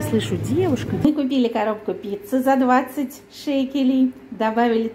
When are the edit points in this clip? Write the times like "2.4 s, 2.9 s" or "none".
1.0 s

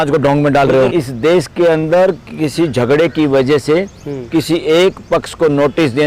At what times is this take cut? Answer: 0.9 s

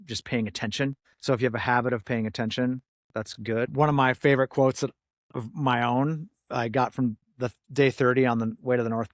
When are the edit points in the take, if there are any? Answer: 1.0 s, 3.7 s

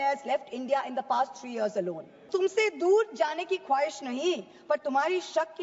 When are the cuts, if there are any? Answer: 2.2 s

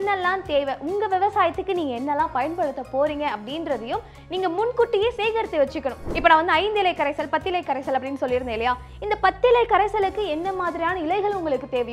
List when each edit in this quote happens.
none

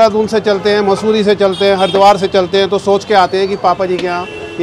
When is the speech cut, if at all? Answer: none

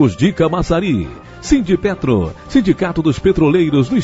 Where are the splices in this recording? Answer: none

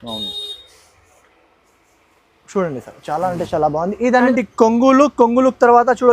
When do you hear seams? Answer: 4.3 s

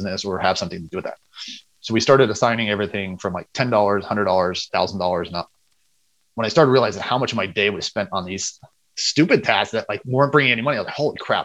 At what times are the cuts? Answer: none

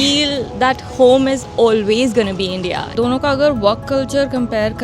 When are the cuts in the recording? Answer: 2.8 s

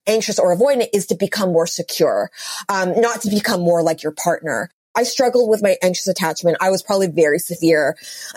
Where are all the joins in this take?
5.0 s

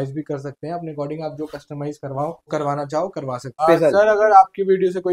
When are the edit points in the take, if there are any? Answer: 2.5 s, 3.5 s

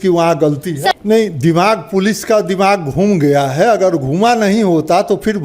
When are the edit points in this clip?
0.9 s

